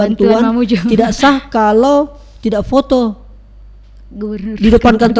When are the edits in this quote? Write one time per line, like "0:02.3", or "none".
none